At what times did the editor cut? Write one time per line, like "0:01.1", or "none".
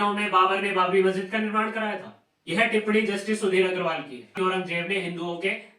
0:04.2